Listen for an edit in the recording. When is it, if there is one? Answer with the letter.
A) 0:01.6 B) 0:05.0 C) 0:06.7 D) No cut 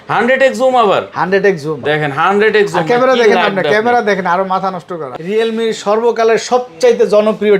B